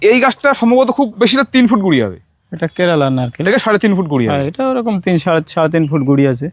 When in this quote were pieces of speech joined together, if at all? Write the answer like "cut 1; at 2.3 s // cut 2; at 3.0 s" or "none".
none